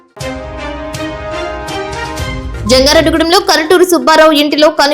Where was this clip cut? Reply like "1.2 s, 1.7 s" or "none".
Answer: 2.5 s